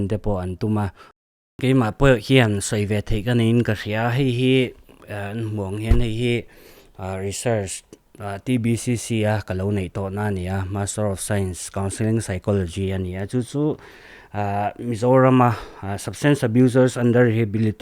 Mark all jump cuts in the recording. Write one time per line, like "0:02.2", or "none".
0:01.3